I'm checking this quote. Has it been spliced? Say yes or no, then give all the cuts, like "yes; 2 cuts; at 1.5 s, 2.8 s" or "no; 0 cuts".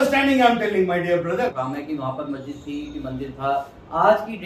yes; 1 cut; at 1.5 s